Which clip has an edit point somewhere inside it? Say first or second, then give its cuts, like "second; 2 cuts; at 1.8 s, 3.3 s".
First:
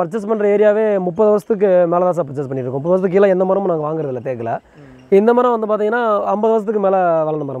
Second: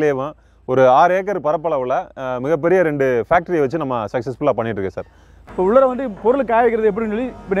second; 1 cut; at 5.3 s